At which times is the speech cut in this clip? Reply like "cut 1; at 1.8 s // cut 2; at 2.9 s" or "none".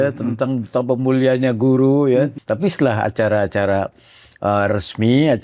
cut 1; at 2.4 s